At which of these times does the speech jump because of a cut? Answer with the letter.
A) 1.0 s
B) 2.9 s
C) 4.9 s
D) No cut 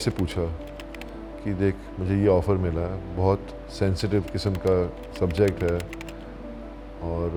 D